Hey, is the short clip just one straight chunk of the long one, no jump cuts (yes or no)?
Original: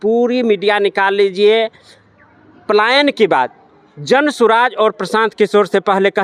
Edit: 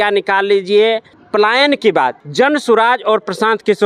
no